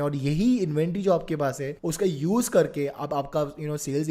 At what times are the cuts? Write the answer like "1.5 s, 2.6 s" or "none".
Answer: none